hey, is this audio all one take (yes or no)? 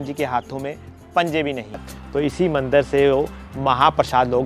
no